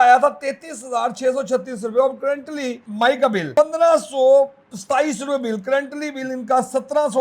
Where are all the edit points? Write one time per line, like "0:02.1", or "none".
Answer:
0:02.8
0:03.5